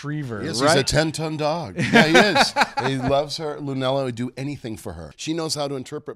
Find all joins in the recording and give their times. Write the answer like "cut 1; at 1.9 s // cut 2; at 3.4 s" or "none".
cut 1; at 5.1 s